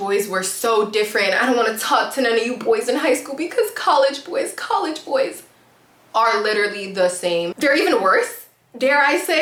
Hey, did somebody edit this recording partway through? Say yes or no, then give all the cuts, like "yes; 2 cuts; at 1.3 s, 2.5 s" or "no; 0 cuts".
no; 0 cuts